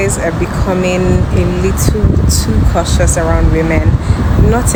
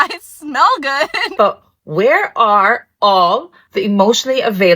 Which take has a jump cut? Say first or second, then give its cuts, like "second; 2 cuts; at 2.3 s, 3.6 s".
second; 1 cut; at 1.2 s